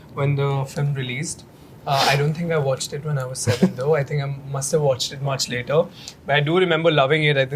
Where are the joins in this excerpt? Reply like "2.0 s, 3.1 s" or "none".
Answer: none

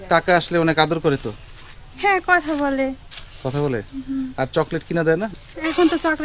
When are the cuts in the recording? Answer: 5.3 s

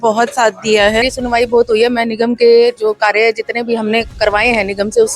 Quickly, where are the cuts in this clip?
1.1 s

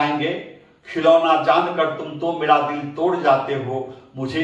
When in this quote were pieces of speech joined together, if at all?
none

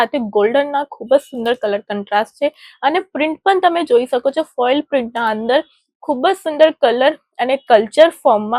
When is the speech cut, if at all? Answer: none

